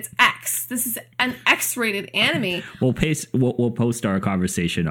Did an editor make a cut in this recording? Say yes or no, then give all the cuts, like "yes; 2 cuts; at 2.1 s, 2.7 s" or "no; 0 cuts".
yes; 1 cut; at 2.6 s